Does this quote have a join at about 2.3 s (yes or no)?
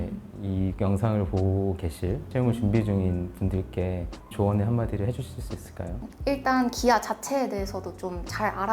yes